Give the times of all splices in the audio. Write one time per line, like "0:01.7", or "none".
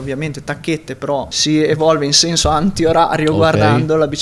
0:01.3